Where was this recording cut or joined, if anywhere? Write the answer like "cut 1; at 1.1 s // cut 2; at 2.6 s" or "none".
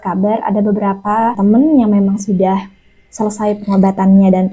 none